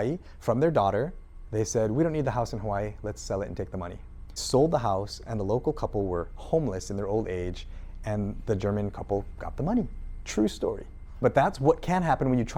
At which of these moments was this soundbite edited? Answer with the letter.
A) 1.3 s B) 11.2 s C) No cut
B